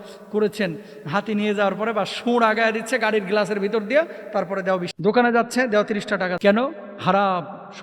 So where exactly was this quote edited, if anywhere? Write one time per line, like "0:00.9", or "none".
0:04.9
0:06.3